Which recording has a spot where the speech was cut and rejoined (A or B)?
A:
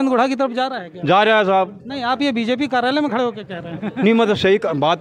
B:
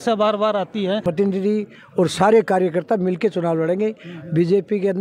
B